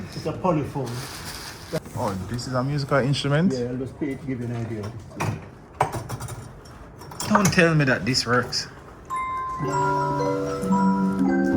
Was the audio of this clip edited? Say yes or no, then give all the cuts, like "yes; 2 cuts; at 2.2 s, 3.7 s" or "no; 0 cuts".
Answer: yes; 1 cut; at 1.8 s